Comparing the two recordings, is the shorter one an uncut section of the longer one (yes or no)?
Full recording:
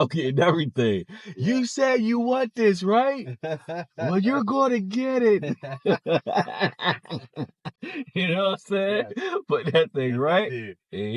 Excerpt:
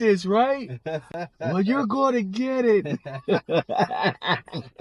yes